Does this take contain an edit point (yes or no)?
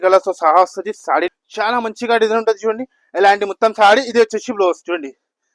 yes